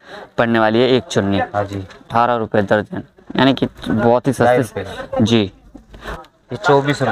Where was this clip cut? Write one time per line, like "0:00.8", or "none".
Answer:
0:02.1
0:06.1